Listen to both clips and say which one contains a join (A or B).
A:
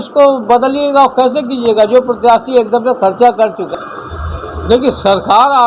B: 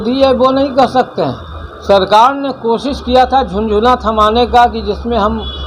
A